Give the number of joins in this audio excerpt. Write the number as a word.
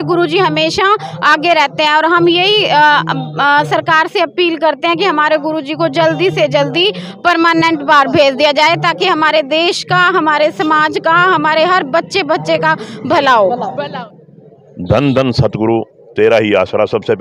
one